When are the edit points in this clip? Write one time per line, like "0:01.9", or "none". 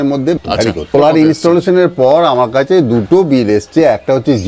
0:00.9